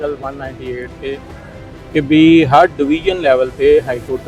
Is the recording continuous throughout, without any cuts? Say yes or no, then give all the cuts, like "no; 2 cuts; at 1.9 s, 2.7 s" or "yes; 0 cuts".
yes; 0 cuts